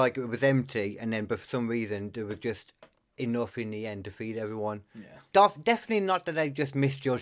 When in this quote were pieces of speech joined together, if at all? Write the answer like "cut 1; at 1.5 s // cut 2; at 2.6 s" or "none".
none

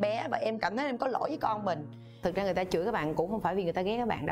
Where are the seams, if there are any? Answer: none

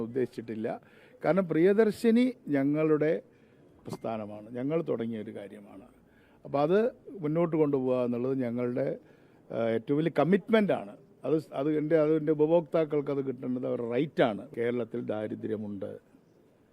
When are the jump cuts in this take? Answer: cut 1; at 14.5 s

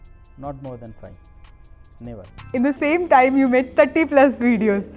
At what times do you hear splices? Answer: cut 1; at 2.5 s

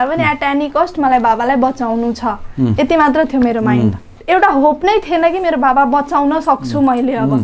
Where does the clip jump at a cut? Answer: cut 1; at 4.1 s

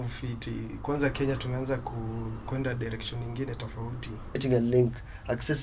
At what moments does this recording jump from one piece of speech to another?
cut 1; at 4.4 s

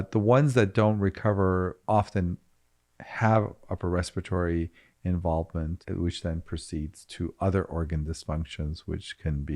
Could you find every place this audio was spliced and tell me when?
cut 1; at 5.8 s

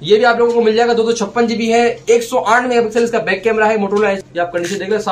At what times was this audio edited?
cut 1; at 4.2 s

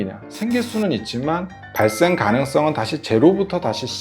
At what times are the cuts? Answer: cut 1; at 1.6 s

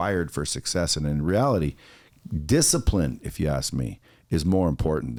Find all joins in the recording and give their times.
none

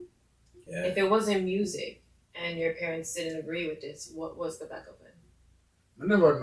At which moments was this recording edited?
none

